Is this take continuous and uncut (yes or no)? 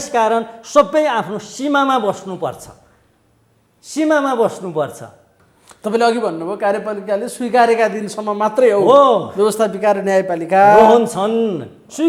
yes